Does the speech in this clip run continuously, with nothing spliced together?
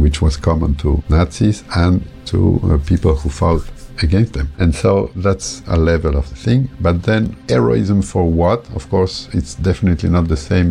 yes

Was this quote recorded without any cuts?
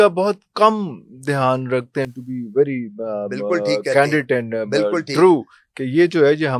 yes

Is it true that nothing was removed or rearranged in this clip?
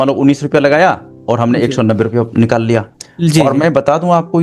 yes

